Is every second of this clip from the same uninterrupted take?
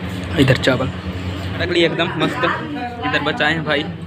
no; 1 cut; at 1.6 s

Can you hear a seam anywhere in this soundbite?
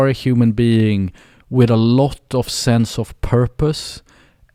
no; 0 cuts

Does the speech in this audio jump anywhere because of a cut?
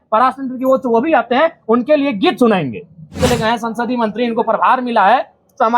yes; 1 cut; at 3.2 s

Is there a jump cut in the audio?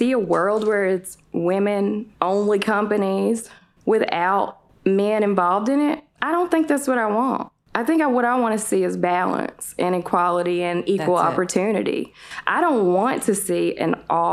no; 0 cuts

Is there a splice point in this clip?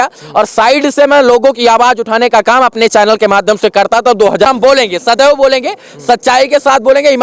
yes; 1 cut; at 4.5 s

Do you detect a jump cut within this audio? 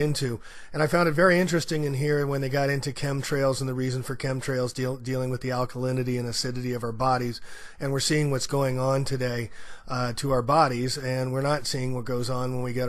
yes; 1 cut; at 8.5 s

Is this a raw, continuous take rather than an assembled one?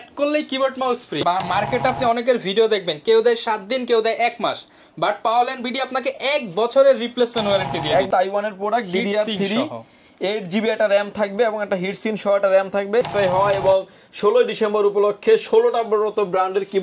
no; 3 cuts; at 1.2 s, 8.1 s, 13.1 s

